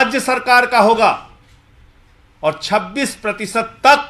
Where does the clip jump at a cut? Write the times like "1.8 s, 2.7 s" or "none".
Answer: none